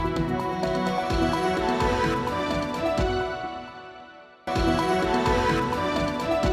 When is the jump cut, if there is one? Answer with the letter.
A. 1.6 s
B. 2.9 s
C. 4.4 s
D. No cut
C